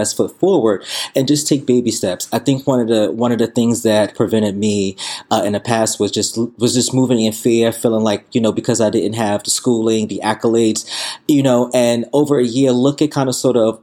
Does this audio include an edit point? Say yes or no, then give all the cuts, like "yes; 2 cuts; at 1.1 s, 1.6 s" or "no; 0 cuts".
no; 0 cuts